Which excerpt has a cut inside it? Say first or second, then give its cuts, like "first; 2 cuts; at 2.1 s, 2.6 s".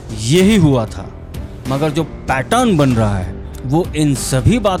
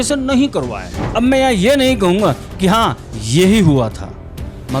second; 1 cut; at 1.0 s